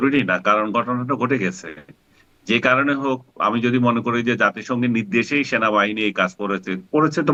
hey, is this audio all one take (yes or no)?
yes